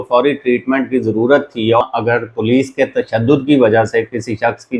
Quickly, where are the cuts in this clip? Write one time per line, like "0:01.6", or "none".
0:01.8